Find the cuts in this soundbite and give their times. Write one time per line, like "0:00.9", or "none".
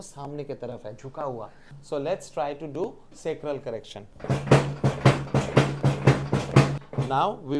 none